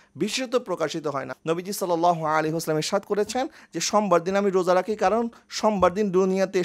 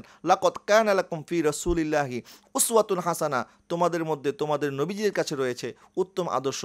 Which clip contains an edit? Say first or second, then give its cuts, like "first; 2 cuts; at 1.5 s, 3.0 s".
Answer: first; 1 cut; at 1.3 s